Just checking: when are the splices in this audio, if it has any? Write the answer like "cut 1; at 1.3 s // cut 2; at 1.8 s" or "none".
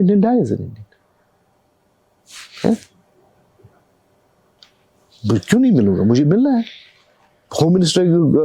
none